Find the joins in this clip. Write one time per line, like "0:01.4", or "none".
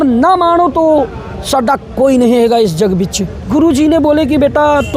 0:03.4